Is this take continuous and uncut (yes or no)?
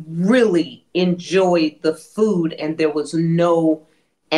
yes